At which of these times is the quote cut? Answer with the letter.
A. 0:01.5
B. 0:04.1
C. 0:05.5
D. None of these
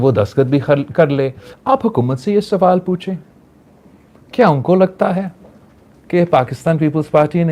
A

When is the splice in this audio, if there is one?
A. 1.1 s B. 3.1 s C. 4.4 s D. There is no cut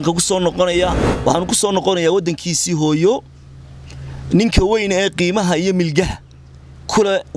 A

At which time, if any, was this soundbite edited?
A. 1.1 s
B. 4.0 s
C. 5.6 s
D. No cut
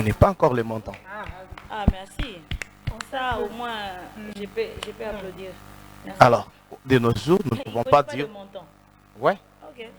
D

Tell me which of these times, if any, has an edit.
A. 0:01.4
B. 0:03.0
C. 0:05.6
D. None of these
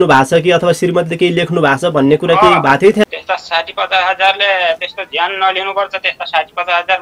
B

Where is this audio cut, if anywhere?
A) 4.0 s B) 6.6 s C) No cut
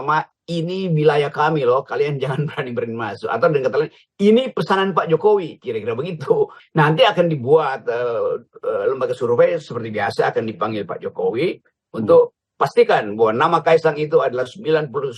B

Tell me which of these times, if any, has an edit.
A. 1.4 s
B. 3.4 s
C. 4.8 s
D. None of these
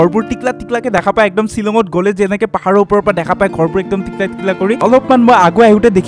C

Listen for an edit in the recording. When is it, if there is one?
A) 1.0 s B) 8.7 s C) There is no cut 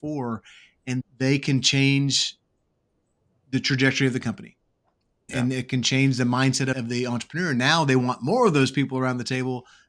A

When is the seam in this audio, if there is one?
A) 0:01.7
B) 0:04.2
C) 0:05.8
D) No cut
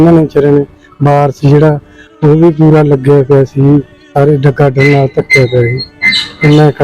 A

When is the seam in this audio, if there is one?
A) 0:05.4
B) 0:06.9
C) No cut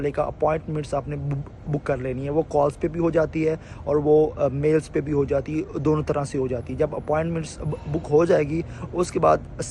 C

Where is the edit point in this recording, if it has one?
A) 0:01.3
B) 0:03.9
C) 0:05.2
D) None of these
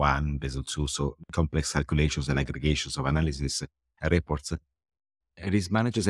C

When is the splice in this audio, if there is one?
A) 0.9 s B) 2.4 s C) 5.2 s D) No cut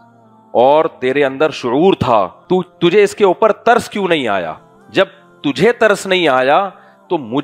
B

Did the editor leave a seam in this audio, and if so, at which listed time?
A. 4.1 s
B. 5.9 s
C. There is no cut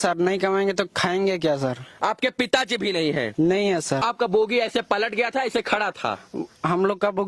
A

